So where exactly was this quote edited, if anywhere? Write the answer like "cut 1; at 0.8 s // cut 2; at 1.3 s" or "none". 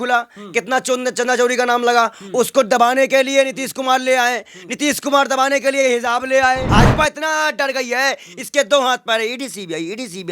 cut 1; at 6.7 s